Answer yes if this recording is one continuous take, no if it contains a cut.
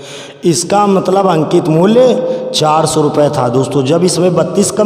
yes